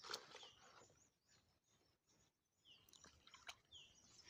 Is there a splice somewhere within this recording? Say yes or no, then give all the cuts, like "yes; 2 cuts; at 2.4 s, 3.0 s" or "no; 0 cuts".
no; 0 cuts